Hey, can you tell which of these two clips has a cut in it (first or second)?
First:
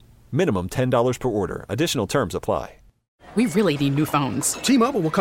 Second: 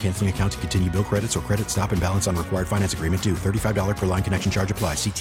first